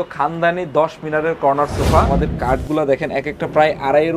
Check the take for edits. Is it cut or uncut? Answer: cut